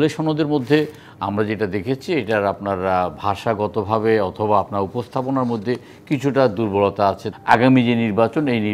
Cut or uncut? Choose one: cut